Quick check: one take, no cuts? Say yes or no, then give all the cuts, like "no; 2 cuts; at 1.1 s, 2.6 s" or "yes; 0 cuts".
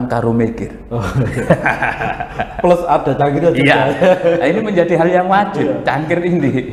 yes; 0 cuts